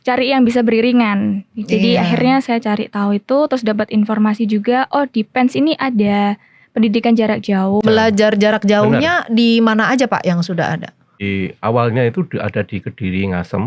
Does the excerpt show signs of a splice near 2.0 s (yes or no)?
no